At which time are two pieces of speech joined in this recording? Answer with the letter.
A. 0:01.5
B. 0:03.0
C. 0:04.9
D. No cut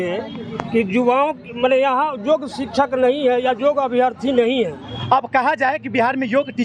C